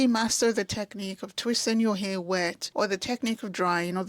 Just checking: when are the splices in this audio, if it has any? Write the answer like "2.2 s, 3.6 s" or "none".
2.6 s